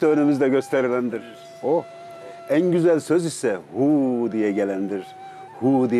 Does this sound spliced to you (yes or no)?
no